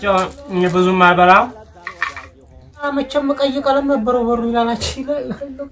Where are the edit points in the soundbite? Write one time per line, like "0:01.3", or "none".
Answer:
0:02.9